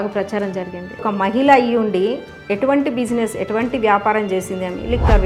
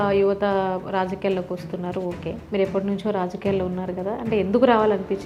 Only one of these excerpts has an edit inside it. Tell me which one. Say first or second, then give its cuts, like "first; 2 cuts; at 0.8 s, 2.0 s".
first; 1 cut; at 1.0 s